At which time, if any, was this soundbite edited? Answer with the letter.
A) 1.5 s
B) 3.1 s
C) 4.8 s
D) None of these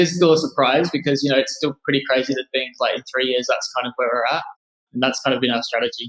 C